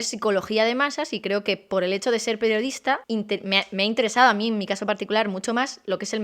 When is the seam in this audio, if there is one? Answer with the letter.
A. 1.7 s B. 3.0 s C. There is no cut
B